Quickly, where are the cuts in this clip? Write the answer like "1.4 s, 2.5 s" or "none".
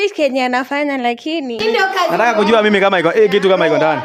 1.6 s